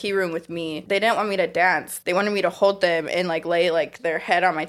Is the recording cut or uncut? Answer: cut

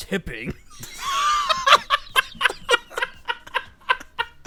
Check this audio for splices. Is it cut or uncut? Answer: uncut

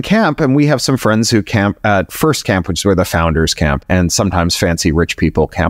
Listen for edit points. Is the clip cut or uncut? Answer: uncut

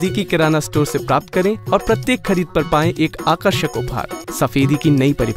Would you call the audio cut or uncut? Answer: cut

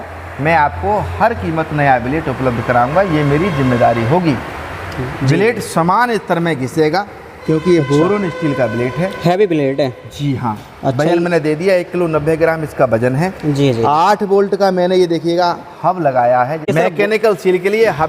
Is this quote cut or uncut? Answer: uncut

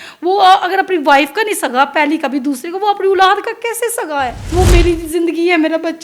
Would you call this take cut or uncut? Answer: cut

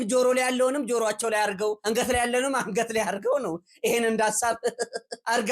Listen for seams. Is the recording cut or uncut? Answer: uncut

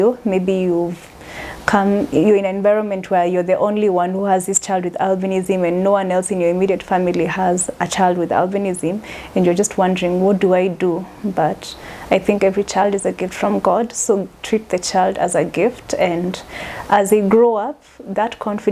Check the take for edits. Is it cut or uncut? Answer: uncut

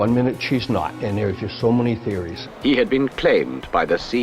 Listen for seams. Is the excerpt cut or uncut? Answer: cut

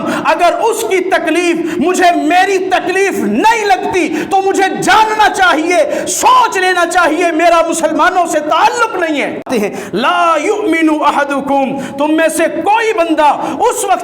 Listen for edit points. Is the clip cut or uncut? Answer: cut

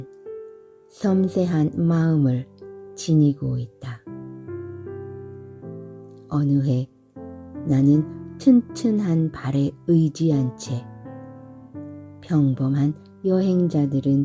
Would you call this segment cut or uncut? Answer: uncut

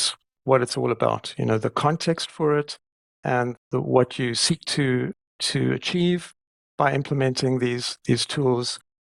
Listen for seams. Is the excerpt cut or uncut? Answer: uncut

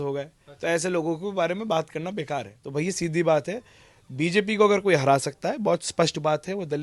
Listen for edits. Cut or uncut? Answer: cut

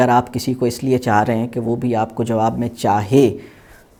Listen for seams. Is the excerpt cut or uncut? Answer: uncut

